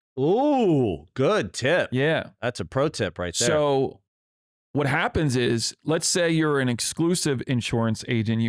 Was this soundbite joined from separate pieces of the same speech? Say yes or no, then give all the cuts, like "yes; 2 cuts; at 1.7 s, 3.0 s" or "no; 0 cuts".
no; 0 cuts